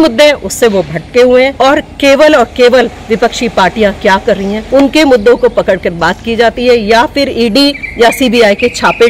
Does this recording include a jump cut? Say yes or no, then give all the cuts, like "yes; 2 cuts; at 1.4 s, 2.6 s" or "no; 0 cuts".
yes; 3 cuts; at 1.5 s, 4.6 s, 7.8 s